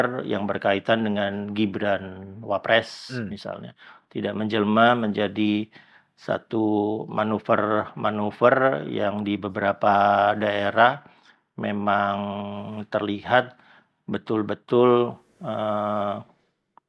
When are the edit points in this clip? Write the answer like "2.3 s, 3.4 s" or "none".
none